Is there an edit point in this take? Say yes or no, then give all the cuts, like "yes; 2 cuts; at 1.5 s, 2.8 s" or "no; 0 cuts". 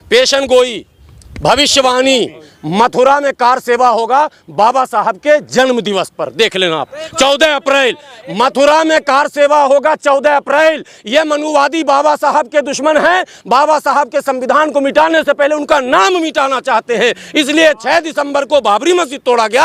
no; 0 cuts